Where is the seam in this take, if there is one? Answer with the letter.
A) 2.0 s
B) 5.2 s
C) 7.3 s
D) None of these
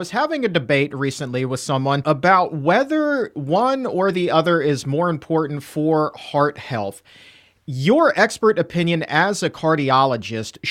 A